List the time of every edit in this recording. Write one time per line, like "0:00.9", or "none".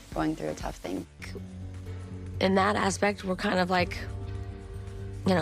0:01.1